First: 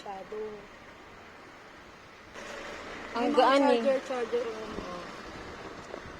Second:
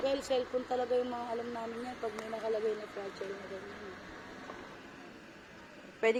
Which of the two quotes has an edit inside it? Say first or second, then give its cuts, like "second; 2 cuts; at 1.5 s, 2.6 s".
first; 1 cut; at 2.4 s